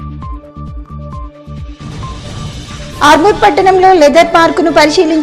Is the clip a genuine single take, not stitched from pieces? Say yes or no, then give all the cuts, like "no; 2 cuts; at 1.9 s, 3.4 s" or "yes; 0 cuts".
no; 2 cuts; at 0.8 s, 1.9 s